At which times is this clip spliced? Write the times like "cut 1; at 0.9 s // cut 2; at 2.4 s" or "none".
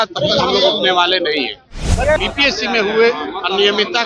cut 1; at 2.2 s